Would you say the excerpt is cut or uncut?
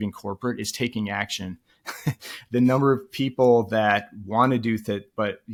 uncut